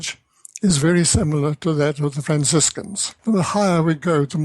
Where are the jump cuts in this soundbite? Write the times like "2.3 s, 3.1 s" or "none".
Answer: 3.1 s